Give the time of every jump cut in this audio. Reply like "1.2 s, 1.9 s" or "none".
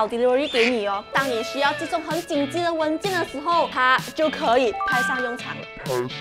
1.1 s